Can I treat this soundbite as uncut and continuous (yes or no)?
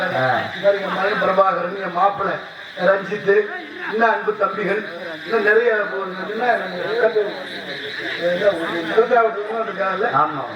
yes